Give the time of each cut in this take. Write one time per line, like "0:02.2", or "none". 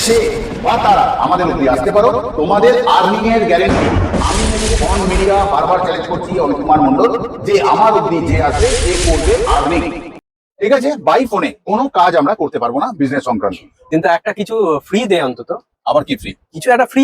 0:13.7